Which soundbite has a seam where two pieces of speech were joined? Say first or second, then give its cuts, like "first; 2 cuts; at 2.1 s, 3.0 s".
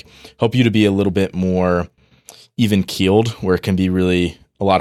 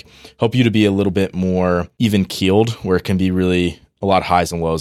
second; 1 cut; at 1.9 s